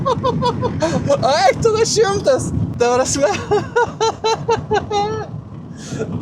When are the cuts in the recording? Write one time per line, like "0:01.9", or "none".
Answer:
0:02.7